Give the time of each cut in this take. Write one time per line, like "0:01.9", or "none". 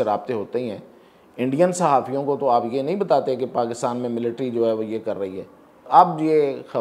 0:05.8